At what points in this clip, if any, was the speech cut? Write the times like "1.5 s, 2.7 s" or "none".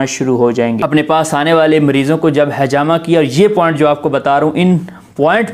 0.9 s